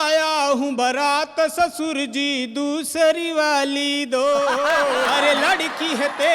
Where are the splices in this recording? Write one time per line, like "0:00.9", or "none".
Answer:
0:05.1